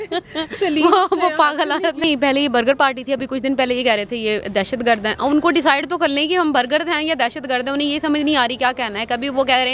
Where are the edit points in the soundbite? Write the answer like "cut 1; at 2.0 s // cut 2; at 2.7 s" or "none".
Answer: cut 1; at 2.1 s

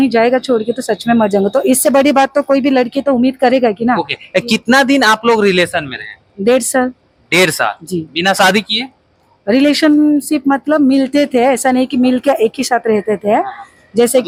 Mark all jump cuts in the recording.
none

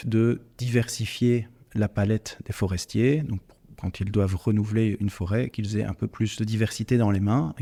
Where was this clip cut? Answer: none

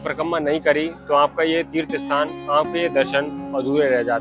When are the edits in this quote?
none

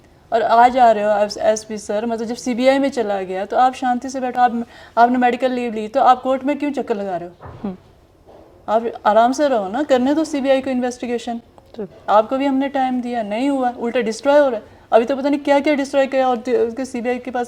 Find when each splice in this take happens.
none

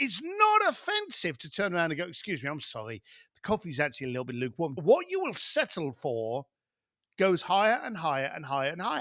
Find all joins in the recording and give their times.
cut 1; at 4.8 s

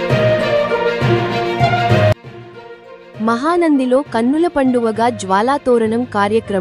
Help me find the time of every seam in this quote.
none

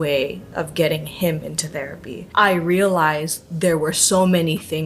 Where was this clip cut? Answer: cut 1; at 2.2 s

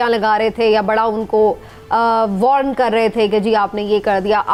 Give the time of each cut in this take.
none

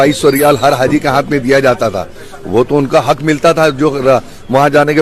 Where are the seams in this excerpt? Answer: none

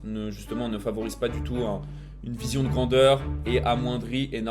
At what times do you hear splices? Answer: cut 1; at 3.4 s

